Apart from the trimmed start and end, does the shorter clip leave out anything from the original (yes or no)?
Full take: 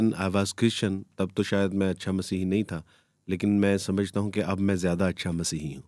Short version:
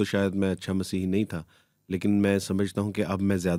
no